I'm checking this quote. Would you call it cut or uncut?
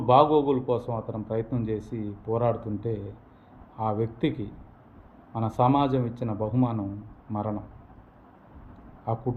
uncut